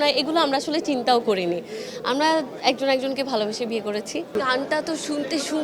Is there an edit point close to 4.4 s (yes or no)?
yes